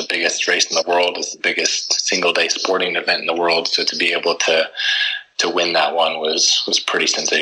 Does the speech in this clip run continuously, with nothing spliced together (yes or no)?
yes